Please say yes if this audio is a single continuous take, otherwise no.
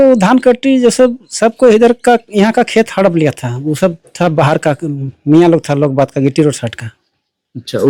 yes